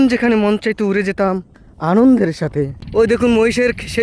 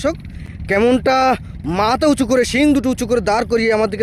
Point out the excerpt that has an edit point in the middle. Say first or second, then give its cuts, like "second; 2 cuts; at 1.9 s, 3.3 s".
first; 1 cut; at 2.8 s